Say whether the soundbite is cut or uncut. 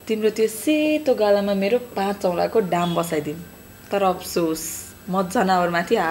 uncut